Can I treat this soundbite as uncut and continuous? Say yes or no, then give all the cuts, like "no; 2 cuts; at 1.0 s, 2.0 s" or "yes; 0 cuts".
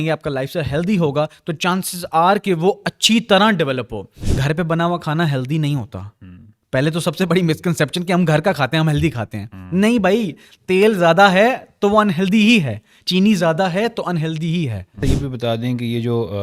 no; 2 cuts; at 4.1 s, 15.0 s